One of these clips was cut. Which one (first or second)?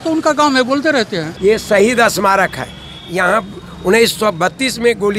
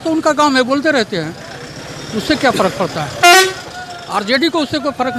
first